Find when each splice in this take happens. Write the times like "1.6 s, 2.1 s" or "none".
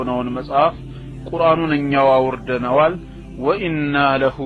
none